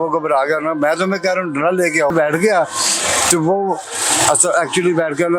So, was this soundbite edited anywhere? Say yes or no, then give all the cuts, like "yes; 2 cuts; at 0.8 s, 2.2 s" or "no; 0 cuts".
yes; 1 cut; at 2.1 s